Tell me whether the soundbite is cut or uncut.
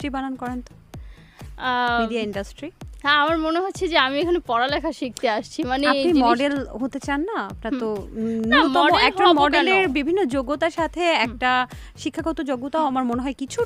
uncut